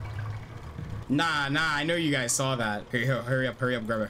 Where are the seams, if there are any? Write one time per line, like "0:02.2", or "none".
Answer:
0:01.0
0:02.8